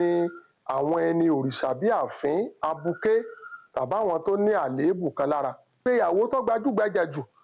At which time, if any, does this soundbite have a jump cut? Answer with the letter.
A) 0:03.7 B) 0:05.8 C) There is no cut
B